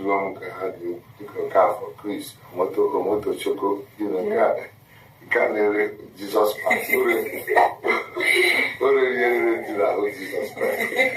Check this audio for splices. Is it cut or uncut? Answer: cut